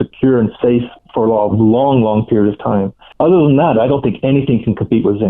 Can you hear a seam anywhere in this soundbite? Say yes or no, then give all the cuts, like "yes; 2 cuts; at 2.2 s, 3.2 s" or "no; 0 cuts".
yes; 2 cuts; at 1.0 s, 3.0 s